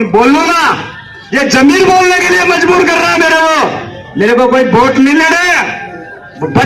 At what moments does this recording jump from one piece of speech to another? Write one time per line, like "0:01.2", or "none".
none